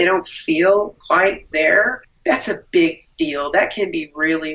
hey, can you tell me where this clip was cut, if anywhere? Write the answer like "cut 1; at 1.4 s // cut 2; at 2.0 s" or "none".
cut 1; at 1.0 s // cut 2; at 2.0 s